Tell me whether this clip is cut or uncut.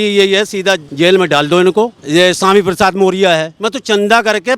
cut